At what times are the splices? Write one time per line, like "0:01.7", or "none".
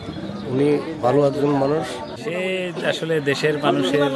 0:02.2